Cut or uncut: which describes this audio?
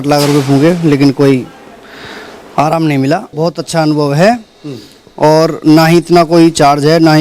cut